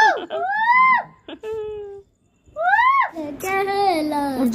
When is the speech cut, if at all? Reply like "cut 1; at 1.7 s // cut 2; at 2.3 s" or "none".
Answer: cut 1; at 3.2 s